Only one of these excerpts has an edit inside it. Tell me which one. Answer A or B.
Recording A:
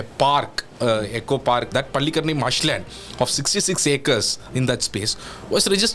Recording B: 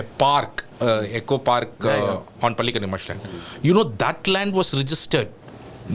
A